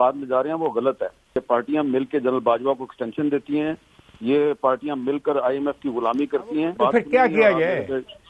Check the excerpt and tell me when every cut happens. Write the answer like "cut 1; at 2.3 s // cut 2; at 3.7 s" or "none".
cut 1; at 1.4 s // cut 2; at 6.7 s